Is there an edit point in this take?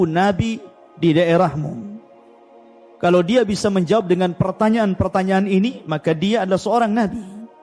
no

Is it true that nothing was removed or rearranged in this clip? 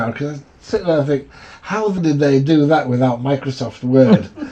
no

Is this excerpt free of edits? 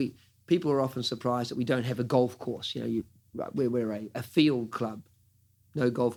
yes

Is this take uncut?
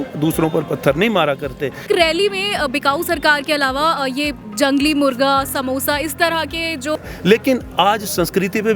no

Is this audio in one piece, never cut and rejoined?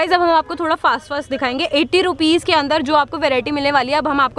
yes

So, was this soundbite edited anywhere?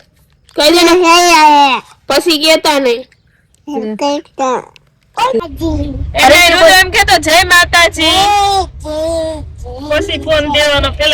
yes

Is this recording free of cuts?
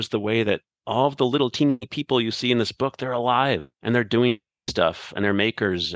no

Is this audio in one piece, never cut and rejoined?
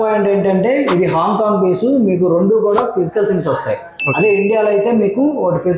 yes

